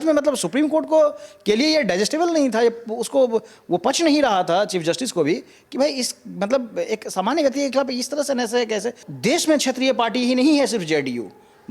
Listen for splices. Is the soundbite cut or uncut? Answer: cut